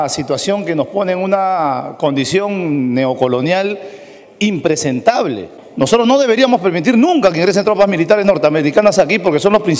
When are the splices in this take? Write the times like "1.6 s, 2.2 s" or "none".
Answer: 5.6 s